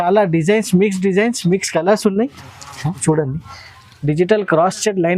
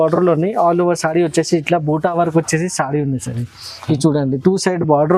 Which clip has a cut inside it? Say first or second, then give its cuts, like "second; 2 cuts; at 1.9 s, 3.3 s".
first; 1 cut; at 3.0 s